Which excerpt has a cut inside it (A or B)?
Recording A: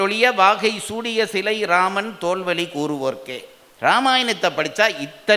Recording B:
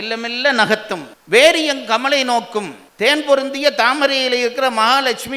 B